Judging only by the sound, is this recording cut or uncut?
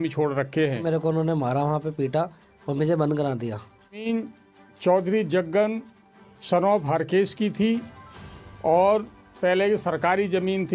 cut